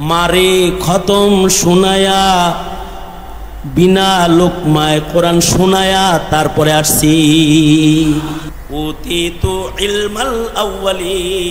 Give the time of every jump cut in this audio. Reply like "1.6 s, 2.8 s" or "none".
8.5 s